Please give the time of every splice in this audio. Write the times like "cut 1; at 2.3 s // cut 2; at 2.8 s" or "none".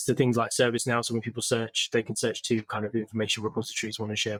none